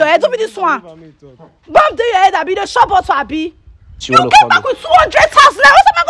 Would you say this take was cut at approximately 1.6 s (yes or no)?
no